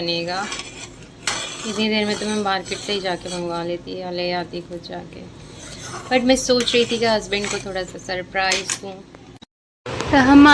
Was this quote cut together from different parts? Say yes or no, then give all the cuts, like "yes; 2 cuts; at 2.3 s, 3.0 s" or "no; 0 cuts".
yes; 1 cut; at 9.5 s